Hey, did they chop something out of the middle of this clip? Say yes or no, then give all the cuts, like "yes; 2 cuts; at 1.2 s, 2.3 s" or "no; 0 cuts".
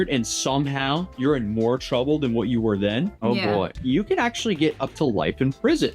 yes; 1 cut; at 3.8 s